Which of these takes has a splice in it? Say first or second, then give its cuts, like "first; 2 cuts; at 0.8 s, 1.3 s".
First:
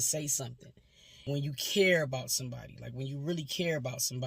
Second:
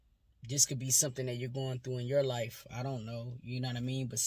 first; 1 cut; at 1.0 s